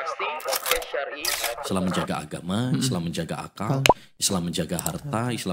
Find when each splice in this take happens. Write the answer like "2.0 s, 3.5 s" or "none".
none